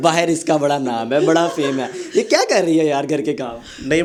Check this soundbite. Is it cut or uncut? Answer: uncut